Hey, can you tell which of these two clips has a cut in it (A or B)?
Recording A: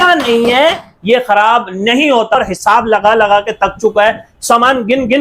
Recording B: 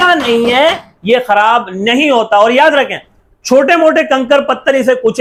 A